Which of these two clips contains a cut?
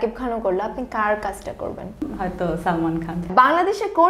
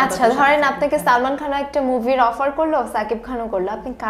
first; 2 cuts; at 2.0 s, 3.2 s

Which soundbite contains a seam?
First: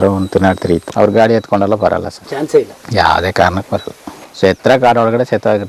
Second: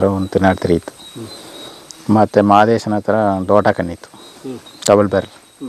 first; 2 cuts; at 0.9 s, 2.2 s

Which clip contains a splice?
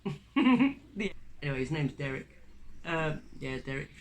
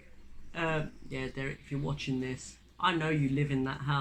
first; 1 cut; at 1.1 s

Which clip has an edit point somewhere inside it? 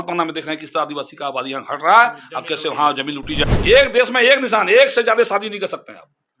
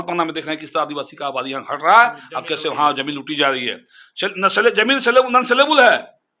first; 1 cut; at 3.4 s

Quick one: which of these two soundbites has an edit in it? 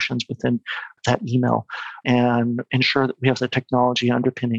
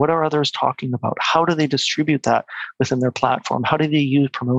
first; 3 cuts; at 1.0 s, 2.0 s, 2.7 s

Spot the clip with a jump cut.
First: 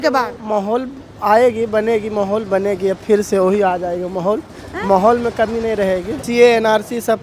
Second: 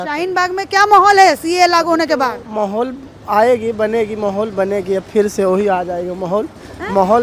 first; 1 cut; at 6.2 s

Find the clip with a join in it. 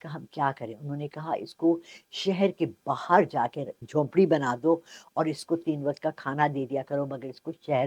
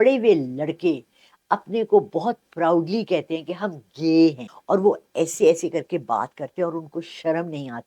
second; 1 cut; at 4.5 s

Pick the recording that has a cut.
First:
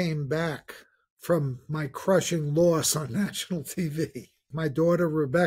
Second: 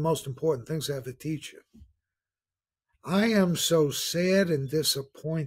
first; 1 cut; at 4.4 s

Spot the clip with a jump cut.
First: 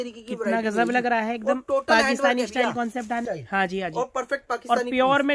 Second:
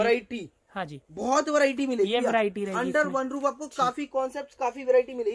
first; 1 cut; at 3.2 s

